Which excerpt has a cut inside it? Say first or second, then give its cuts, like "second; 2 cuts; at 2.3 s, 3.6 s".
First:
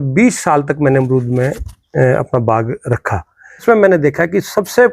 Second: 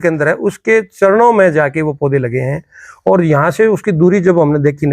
first; 1 cut; at 3.6 s